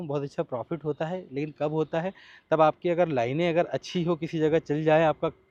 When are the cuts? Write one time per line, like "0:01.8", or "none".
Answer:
none